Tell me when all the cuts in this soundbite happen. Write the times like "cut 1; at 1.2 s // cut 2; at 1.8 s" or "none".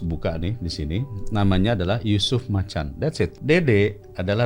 cut 1; at 3.4 s

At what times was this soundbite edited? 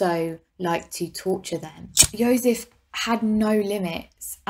cut 1; at 1.9 s

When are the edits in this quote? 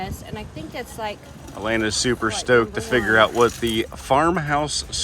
cut 1; at 1.4 s

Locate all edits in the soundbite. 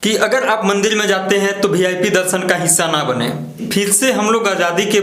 cut 1; at 3.5 s

